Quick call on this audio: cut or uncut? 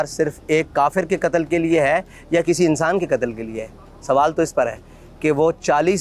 uncut